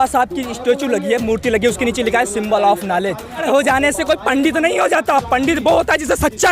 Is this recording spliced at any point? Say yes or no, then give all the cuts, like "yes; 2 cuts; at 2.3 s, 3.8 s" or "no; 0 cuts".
yes; 1 cut; at 3.4 s